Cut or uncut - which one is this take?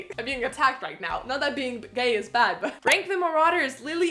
cut